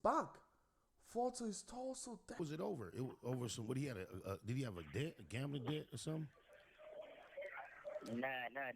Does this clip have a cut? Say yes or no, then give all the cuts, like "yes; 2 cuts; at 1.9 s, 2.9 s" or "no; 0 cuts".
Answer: yes; 1 cut; at 2.4 s